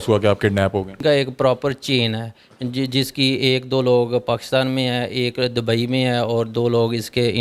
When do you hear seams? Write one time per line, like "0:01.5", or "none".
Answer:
0:01.0